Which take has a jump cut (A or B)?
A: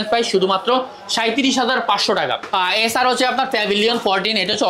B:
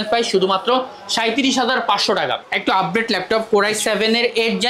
B